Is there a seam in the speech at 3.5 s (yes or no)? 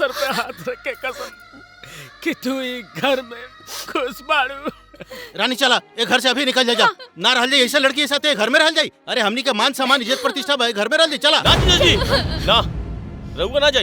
no